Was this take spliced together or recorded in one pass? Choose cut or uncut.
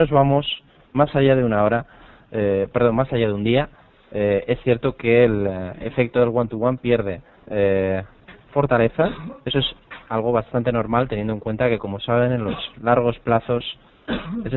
uncut